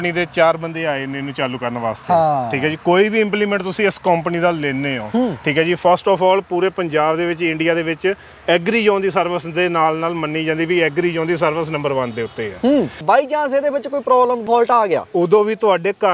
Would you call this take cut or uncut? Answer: cut